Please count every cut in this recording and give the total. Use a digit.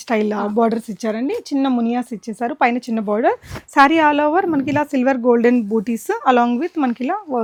0